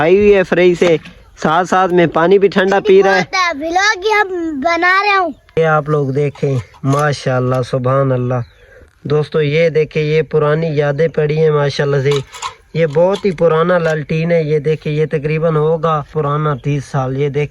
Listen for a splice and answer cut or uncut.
cut